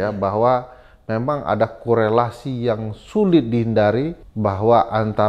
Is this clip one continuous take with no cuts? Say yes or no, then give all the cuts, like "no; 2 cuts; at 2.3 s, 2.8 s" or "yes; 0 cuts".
no; 1 cut; at 4.2 s